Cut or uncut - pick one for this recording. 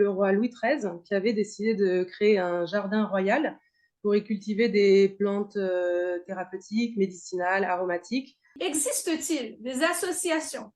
cut